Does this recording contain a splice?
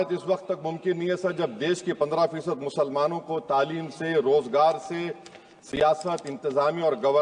no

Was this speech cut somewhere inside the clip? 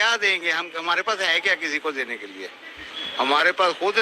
no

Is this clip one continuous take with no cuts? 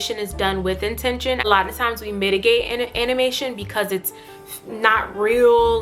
no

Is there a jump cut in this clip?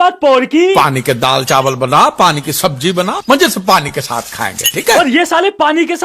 no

